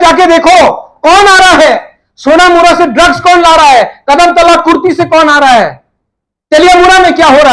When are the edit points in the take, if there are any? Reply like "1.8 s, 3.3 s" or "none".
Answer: none